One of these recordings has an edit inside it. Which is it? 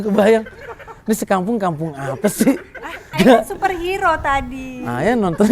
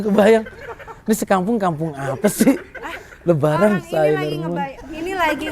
first; 1 cut; at 3.1 s

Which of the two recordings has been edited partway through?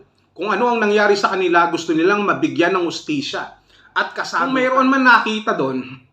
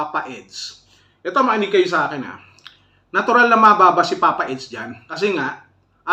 first; 1 cut; at 4.3 s

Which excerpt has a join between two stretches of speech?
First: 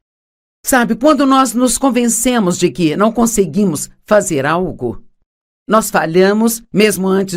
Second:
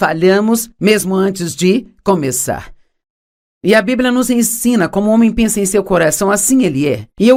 first; 1 cut; at 3.5 s

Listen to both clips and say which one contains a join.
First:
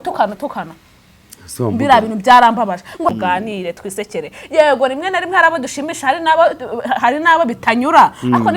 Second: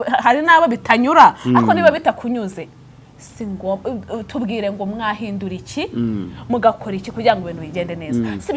first; 1 cut; at 3.1 s

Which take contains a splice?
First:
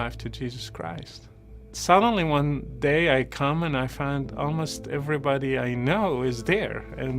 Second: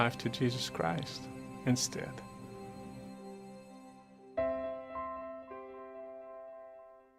first; 1 cut; at 1.6 s

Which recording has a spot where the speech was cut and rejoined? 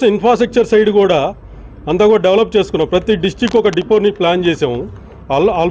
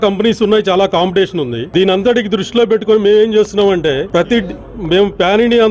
second; 2 cuts; at 1.6 s, 4.0 s

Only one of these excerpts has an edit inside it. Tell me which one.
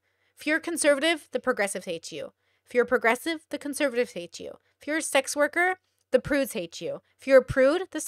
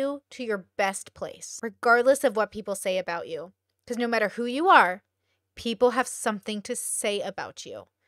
second; 1 cut; at 1.4 s

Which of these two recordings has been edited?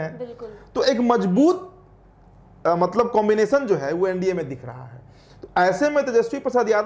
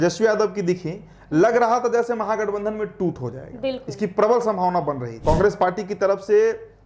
second; 1 cut; at 5.0 s

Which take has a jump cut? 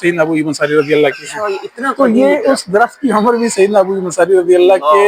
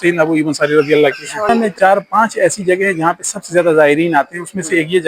second; 1 cut; at 1.5 s

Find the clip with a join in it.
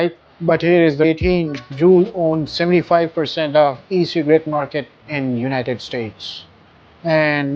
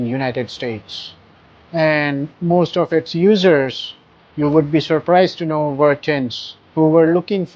first; 1 cut; at 1.0 s

